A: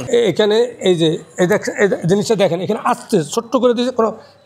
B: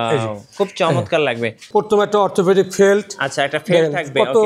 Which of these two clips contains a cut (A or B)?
B